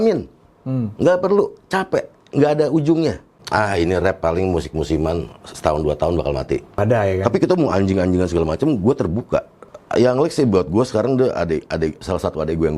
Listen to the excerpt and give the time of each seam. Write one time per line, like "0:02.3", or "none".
0:03.4
0:06.7
0:09.7